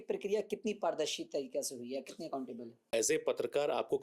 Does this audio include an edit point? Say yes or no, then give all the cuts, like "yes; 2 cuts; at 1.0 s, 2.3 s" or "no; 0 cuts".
yes; 1 cut; at 2.8 s